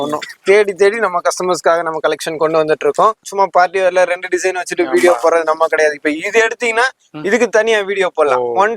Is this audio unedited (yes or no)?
no